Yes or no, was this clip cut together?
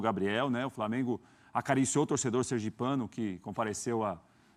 no